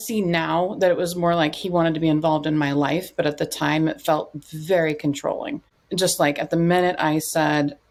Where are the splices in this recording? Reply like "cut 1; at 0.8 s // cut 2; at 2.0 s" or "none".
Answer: none

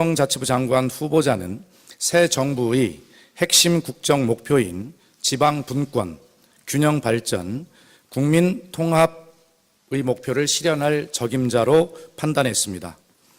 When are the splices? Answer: cut 1; at 8.7 s

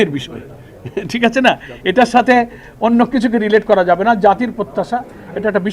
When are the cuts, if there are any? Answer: none

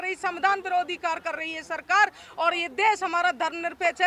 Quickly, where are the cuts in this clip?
none

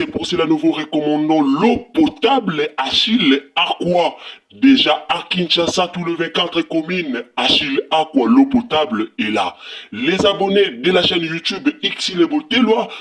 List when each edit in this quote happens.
none

